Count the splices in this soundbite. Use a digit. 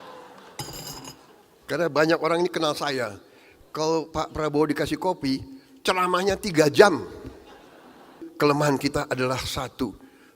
1